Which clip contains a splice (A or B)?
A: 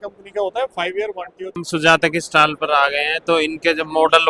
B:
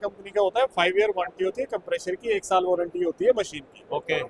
A